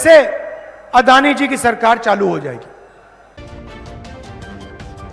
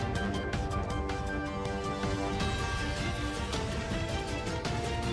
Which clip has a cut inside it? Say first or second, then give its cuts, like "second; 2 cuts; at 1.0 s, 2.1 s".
first; 1 cut; at 3.4 s